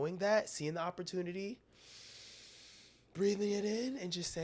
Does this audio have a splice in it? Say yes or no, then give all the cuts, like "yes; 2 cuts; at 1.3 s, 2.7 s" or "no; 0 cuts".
no; 0 cuts